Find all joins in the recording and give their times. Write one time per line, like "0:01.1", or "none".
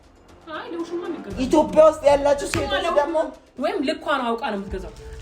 0:03.4